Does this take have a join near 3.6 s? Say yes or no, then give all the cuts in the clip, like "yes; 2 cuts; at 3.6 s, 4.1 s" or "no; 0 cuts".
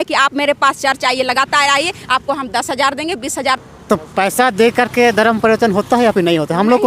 yes; 1 cut; at 3.6 s